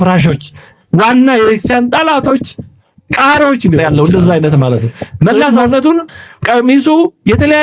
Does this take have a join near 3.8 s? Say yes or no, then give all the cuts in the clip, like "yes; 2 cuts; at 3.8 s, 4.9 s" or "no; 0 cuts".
yes; 1 cut; at 3.8 s